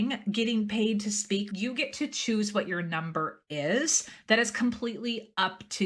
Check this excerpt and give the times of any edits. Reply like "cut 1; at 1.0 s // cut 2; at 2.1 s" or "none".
cut 1; at 1.5 s